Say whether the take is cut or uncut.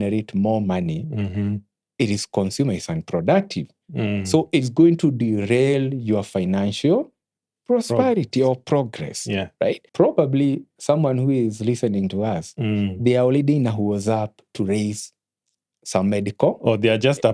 cut